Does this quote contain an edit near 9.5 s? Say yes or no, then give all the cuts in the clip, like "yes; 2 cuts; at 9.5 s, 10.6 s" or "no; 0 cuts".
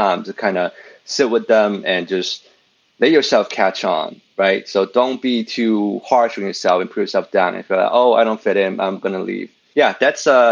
yes; 1 cut; at 9.5 s